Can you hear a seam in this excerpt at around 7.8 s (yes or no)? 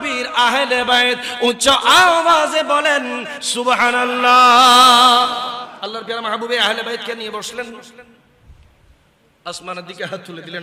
no